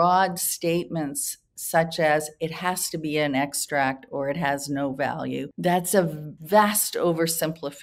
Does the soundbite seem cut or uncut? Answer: cut